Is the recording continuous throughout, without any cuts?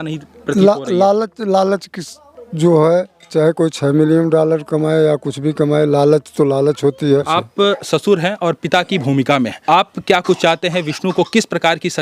no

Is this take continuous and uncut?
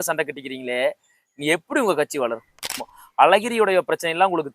no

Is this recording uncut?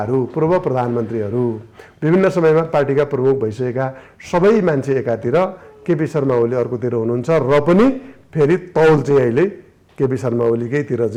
yes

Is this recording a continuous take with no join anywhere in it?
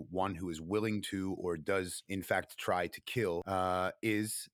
no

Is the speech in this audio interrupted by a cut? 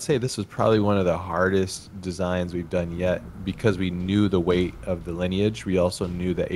no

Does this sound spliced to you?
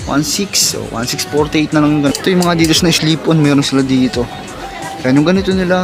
yes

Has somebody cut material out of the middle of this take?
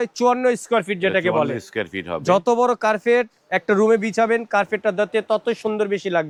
no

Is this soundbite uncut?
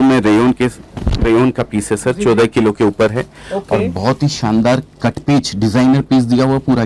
yes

